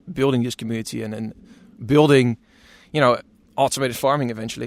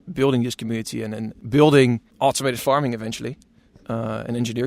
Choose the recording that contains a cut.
second; 2 cuts; at 1.3 s, 2.1 s

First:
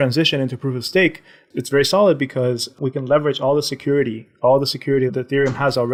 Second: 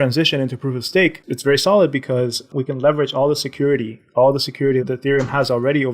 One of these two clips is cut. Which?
second; 1 cut; at 1.3 s

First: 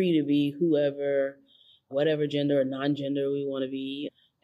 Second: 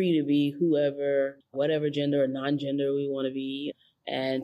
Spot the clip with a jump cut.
second; 1 cut; at 1.4 s

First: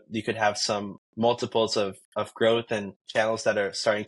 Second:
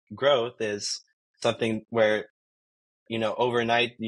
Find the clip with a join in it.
first; 1 cut; at 3.0 s

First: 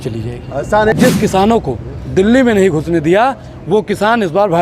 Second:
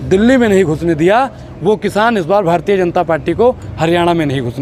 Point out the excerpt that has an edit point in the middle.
first; 1 cut; at 0.9 s

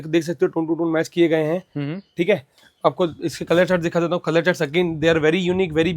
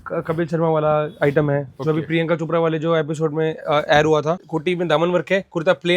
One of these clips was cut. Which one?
second; 1 cut; at 4.5 s

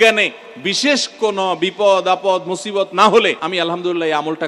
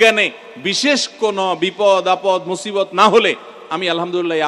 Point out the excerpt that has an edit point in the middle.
first; 1 cut; at 3.4 s

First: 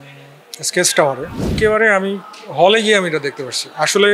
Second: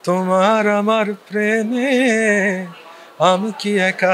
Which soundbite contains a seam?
first; 1 cut; at 1.5 s

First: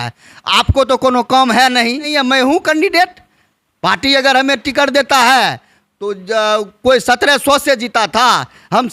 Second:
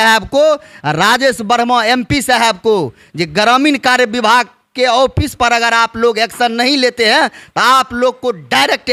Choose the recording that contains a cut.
first; 1 cut; at 2.1 s

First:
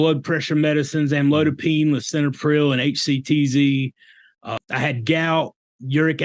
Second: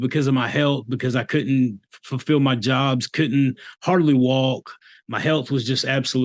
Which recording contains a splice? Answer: first; 1 cut; at 4.6 s

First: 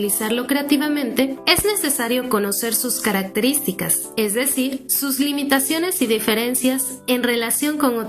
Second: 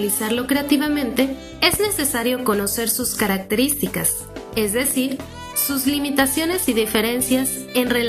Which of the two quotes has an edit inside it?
first; 3 cuts; at 1.4 s, 4.0 s, 4.9 s

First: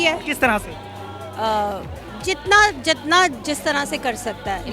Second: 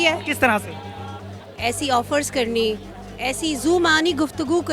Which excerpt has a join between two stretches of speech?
second; 1 cut; at 1.3 s

